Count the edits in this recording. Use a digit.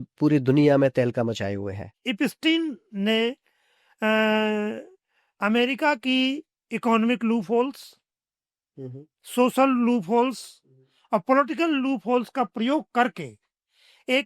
1